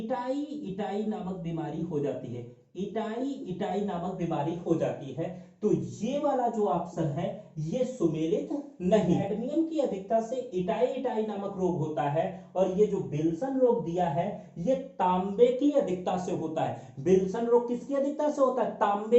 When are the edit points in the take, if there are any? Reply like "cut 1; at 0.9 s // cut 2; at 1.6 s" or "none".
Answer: cut 1; at 9.2 s